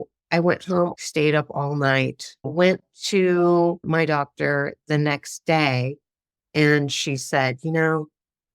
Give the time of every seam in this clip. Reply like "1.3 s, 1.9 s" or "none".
0.9 s, 2.3 s, 3.8 s